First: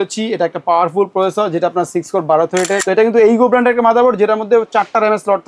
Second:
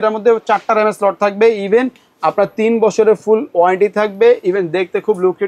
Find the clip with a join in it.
first; 1 cut; at 2.8 s

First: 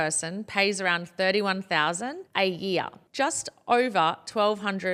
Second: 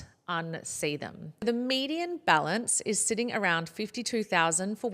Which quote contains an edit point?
second; 1 cut; at 1.4 s

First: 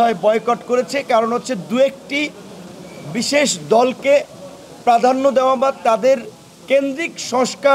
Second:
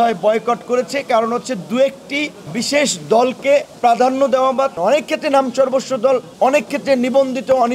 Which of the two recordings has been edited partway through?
second; 4 cuts; at 2.4 s, 3.7 s, 4.8 s, 6.3 s

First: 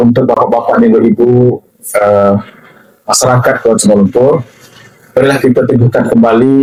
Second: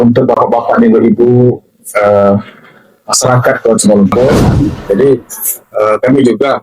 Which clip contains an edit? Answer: second; 1 cut; at 4.5 s

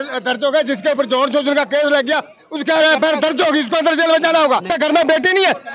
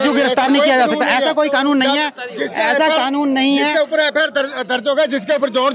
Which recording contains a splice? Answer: first; 1 cut; at 4.7 s

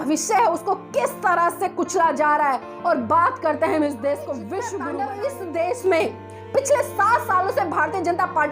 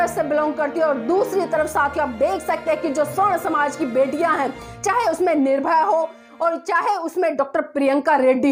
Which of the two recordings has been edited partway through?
first; 1 cut; at 4.8 s

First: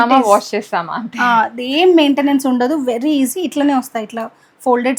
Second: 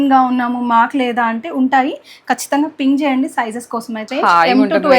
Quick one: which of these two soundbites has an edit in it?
second; 1 cut; at 4.0 s

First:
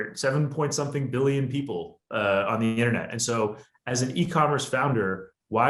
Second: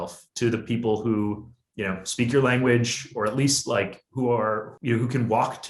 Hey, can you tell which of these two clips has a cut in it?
second; 1 cut; at 4.7 s

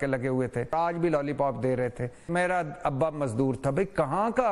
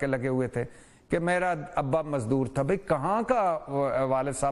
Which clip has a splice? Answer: first; 2 cuts; at 0.7 s, 2.3 s

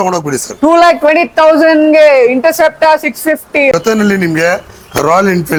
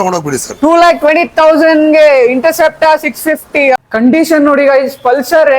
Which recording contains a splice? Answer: second; 1 cut; at 3.7 s

